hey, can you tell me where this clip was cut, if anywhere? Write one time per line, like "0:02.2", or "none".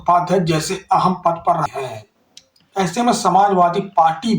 0:01.6